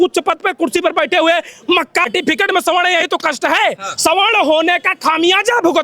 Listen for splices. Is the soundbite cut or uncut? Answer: cut